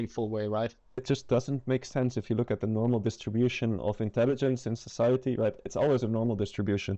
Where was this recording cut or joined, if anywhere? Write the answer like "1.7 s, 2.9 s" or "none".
1.0 s